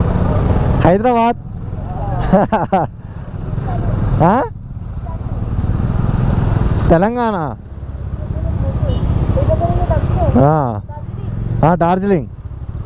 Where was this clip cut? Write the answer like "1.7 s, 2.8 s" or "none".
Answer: none

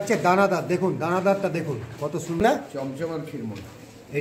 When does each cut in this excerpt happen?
2.4 s

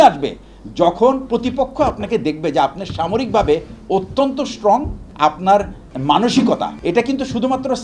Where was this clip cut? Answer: 5.0 s, 5.9 s, 6.8 s

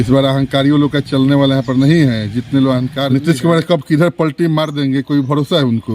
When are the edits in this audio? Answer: 3.1 s

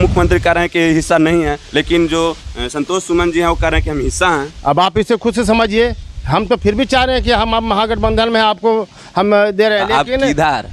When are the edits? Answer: none

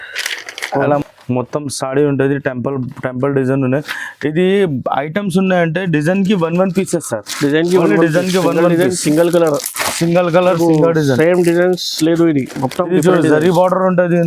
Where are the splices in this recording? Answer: 1.0 s

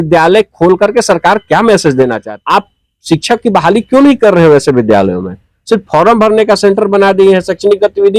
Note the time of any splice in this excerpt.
2.2 s

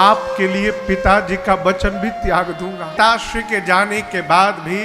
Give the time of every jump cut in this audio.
3.0 s

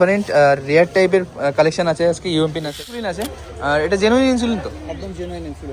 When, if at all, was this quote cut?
3.1 s

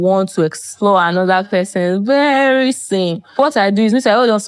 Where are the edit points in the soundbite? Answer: 3.4 s

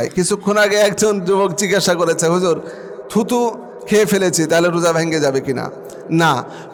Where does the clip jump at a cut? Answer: none

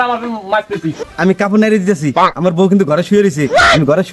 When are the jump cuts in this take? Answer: 0.9 s

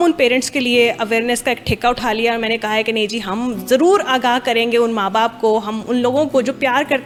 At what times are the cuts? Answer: none

